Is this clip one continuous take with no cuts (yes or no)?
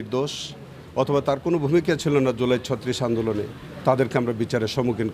yes